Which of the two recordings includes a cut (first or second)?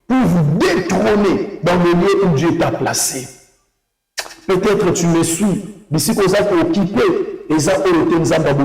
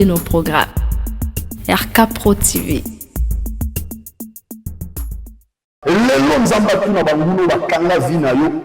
second